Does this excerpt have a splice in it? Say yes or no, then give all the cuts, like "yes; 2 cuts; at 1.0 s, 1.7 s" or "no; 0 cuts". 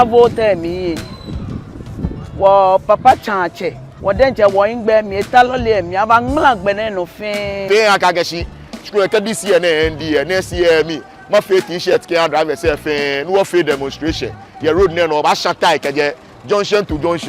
yes; 1 cut; at 7.6 s